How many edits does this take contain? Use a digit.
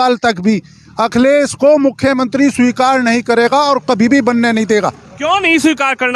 0